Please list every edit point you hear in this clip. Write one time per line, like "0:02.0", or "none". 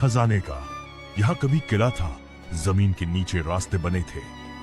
0:00.9